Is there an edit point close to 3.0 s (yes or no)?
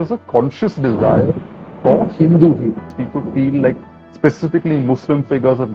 yes